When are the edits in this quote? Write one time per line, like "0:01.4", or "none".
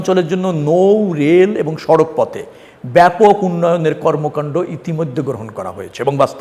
none

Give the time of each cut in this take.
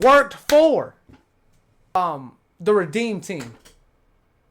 0:02.0

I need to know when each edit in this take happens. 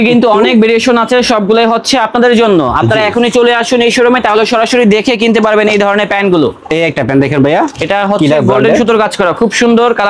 none

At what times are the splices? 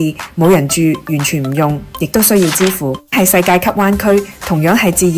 0:03.1

